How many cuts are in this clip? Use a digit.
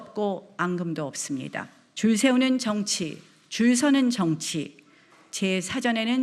1